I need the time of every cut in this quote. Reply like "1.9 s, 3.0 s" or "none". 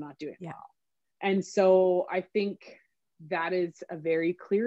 none